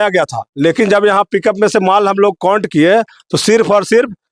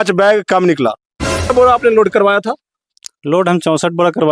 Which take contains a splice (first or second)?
second